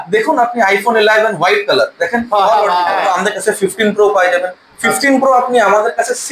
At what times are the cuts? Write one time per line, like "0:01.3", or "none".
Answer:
0:02.9